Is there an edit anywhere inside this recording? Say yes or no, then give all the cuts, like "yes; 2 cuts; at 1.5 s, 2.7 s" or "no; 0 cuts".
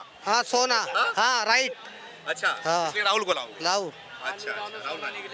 no; 0 cuts